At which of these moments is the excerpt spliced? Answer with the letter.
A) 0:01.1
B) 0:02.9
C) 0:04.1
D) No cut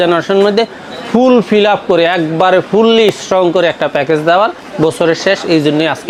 D